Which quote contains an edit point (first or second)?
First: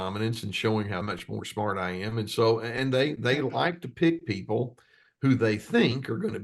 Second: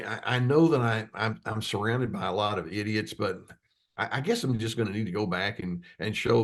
first